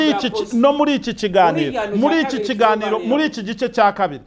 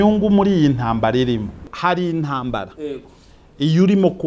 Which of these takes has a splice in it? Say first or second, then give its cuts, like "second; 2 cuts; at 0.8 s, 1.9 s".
second; 1 cut; at 1.6 s